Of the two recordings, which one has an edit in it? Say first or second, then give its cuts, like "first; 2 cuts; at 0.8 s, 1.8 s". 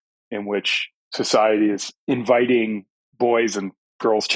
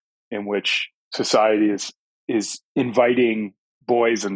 first; 1 cut; at 1.9 s